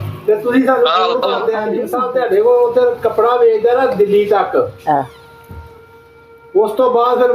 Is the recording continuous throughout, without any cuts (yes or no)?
no